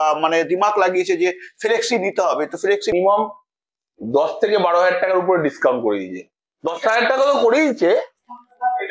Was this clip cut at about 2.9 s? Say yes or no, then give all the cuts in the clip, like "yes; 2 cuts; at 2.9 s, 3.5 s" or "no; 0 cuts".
yes; 1 cut; at 2.9 s